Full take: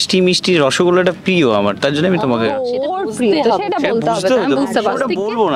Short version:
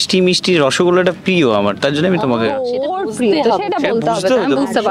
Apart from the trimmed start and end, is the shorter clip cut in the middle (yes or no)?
no